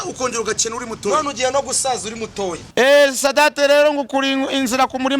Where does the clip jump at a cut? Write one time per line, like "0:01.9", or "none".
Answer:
0:02.6